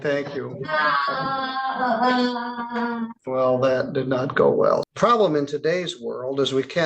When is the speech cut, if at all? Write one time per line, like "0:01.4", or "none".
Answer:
0:03.2
0:04.9